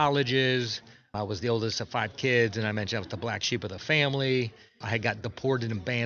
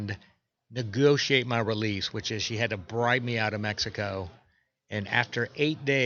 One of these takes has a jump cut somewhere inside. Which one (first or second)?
first